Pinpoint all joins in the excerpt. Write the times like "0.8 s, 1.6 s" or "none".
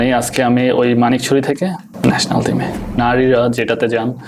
1.9 s, 3.0 s